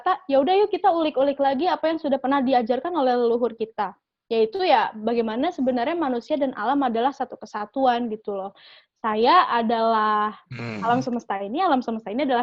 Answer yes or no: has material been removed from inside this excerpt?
no